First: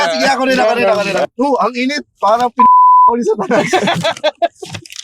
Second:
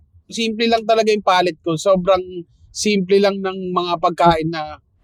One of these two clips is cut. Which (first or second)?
first